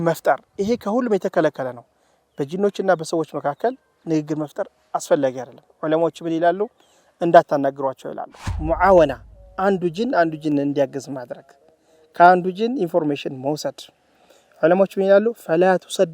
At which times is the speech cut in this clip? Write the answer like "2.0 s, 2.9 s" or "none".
8.5 s